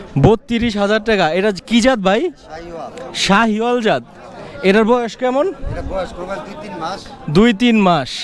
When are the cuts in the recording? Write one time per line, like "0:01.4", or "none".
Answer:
none

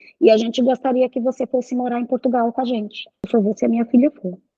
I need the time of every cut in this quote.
0:03.3

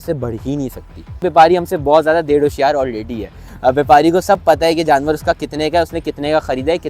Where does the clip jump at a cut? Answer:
0:01.3

